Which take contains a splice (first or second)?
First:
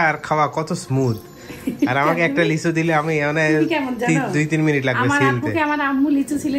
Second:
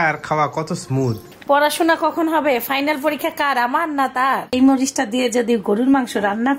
second